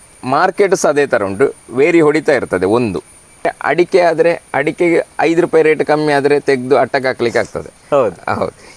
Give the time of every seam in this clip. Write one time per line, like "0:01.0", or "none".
0:03.5